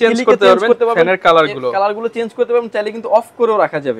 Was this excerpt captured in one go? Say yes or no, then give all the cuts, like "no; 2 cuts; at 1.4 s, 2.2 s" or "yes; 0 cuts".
yes; 0 cuts